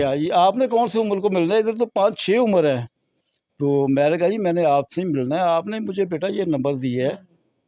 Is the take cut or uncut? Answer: uncut